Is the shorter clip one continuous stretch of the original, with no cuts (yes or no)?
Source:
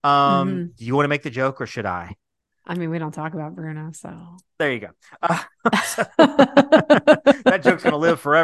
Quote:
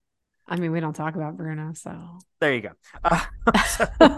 yes